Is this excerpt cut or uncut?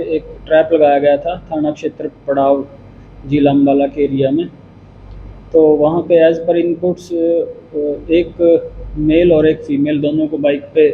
uncut